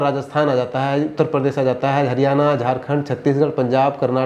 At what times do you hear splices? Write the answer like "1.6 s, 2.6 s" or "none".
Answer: none